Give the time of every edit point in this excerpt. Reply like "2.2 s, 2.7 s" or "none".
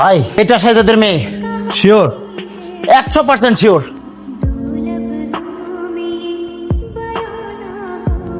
4.0 s